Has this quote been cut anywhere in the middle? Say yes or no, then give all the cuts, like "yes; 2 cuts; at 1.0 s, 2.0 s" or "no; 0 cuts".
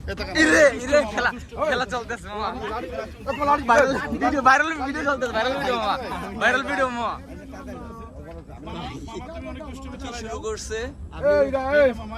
no; 0 cuts